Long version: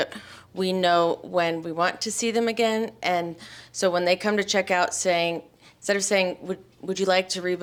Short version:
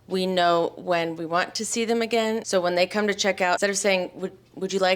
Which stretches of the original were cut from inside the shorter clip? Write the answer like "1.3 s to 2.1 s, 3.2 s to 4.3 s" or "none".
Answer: 2.9 s to 3.7 s, 4.9 s to 5.8 s